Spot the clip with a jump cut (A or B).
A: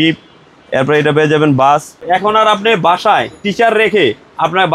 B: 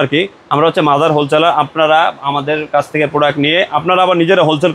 A